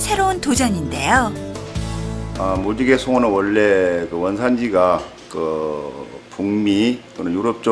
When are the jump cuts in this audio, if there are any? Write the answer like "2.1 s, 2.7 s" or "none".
none